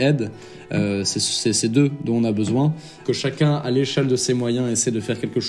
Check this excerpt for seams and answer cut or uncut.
cut